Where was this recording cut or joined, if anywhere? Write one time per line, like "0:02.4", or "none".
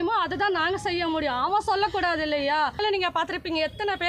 0:02.8

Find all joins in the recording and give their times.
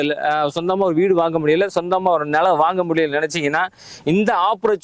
none

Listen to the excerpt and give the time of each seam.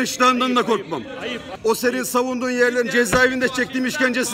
0:01.5

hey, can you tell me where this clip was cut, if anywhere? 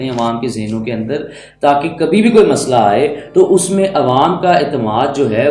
none

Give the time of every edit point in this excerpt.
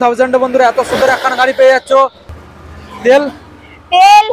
0:02.3

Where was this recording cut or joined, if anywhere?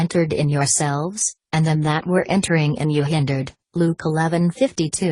0:03.1

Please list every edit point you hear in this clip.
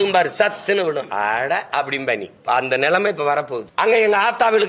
0:02.3
0:03.6

